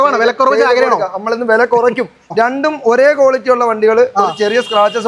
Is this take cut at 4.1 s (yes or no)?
no